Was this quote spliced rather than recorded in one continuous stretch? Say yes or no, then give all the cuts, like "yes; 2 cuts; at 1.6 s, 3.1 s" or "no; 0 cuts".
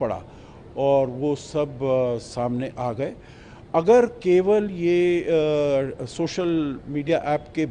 no; 0 cuts